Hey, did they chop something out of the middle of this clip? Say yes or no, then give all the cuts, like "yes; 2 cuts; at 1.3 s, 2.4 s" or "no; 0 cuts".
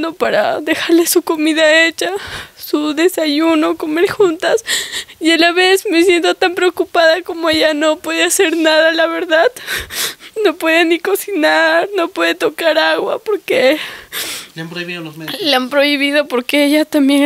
no; 0 cuts